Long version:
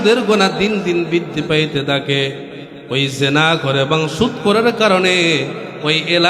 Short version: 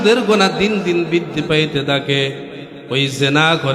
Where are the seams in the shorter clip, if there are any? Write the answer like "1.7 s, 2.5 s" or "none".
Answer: none